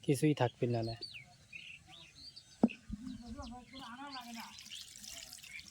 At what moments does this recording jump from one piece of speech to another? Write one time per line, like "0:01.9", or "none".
0:03.8